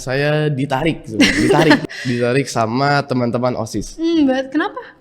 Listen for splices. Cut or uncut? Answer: cut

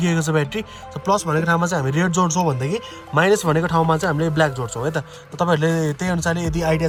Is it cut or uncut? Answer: uncut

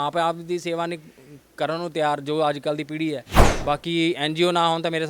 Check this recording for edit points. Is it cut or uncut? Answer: cut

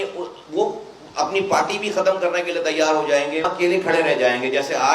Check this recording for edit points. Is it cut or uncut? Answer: cut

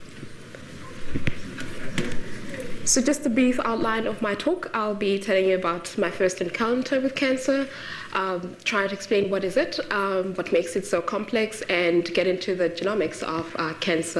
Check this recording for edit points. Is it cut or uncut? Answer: cut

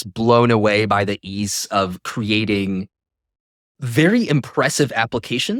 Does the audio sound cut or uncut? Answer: uncut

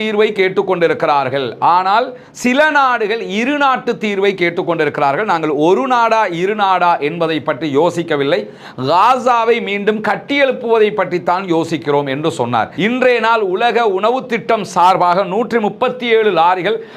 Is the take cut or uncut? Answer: cut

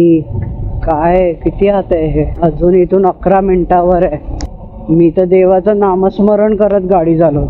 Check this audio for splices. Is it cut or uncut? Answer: cut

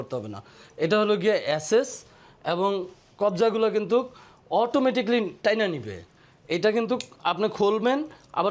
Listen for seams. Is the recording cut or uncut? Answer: uncut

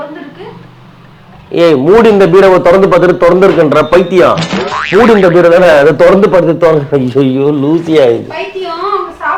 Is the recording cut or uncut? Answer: uncut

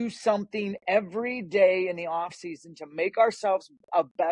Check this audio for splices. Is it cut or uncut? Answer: uncut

